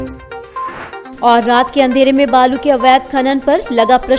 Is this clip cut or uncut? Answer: uncut